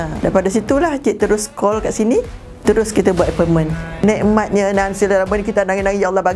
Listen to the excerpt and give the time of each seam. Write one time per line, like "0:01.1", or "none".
0:02.4
0:04.0